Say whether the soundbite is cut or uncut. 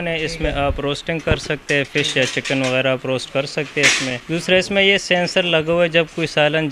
cut